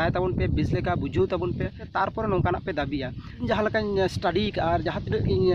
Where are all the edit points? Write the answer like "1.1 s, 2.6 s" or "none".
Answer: 1.8 s, 3.5 s